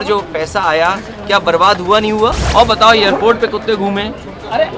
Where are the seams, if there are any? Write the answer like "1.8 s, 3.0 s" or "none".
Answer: 2.4 s